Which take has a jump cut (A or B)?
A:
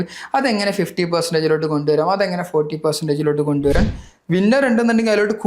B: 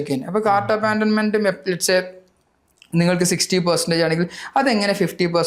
A